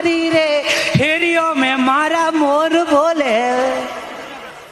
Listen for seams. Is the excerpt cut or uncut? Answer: uncut